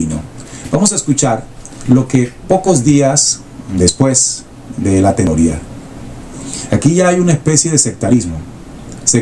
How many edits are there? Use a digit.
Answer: 1